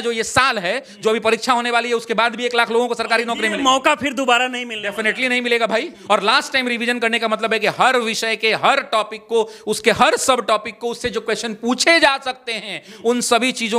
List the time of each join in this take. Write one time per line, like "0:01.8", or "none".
0:05.9